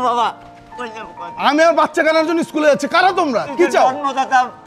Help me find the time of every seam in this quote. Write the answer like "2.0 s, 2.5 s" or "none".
none